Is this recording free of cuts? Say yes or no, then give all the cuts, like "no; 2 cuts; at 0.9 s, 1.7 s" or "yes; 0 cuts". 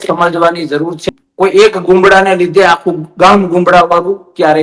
no; 1 cut; at 1.0 s